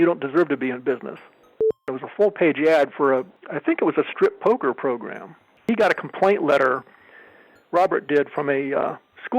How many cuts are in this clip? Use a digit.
3